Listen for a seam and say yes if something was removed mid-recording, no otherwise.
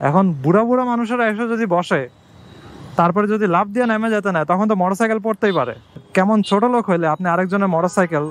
no